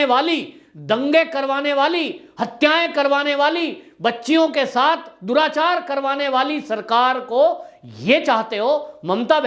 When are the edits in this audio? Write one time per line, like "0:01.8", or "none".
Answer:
none

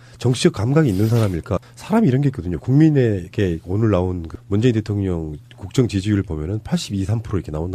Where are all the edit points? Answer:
none

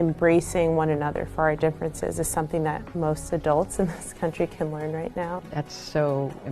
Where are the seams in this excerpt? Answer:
0:02.9
0:05.4

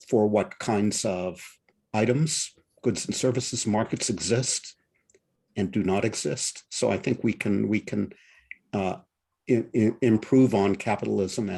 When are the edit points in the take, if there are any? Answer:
0:06.6

